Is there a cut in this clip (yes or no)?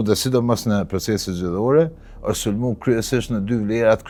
no